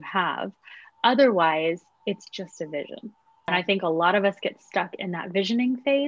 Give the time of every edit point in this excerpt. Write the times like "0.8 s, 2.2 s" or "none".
3.5 s